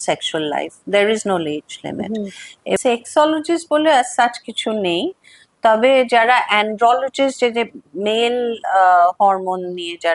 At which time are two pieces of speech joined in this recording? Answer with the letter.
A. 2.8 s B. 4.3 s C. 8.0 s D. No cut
A